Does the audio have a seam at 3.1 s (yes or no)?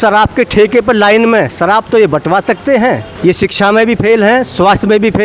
yes